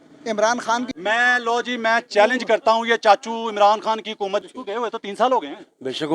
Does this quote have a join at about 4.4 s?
yes; 2 cuts; at 0.9 s, 4.4 s

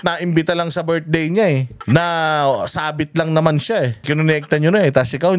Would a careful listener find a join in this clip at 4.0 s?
yes; 2 cuts; at 1.7 s, 4.0 s

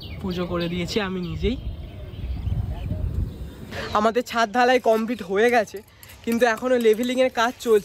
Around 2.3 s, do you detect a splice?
no; 1 cut; at 3.7 s

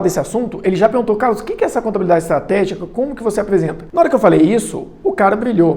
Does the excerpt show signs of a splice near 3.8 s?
yes; 1 cut; at 3.8 s

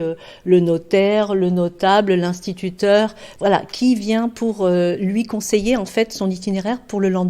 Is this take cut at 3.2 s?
yes; 1 cut; at 3.2 s

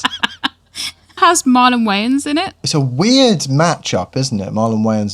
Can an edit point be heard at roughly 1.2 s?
yes; 2 cuts; at 1.2 s, 2.6 s

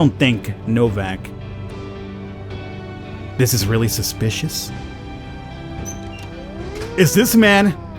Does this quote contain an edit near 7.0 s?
yes; 1 cut; at 7.0 s

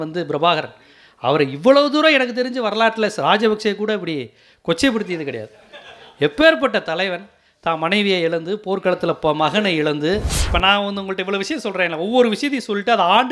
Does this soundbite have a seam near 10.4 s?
yes; 1 cut; at 10.4 s

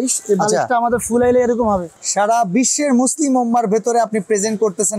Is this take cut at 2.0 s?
yes; 1 cut; at 2.0 s

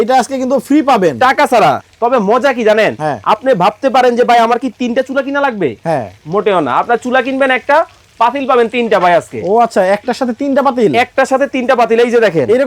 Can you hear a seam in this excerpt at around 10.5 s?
no; 1 cut; at 1.8 s

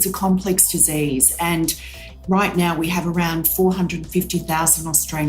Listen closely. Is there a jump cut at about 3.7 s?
no; 1 cut; at 2.2 s

